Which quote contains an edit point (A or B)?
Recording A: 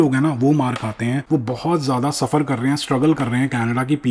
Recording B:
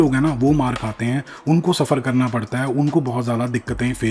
A